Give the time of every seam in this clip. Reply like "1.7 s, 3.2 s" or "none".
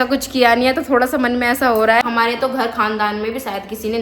2.0 s